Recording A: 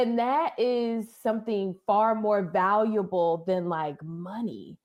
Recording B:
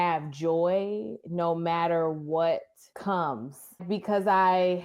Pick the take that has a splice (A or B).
B